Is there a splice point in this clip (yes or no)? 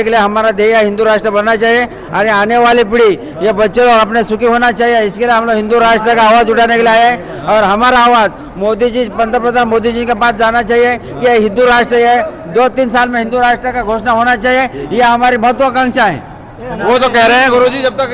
no